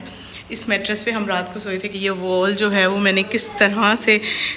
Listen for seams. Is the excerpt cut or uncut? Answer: cut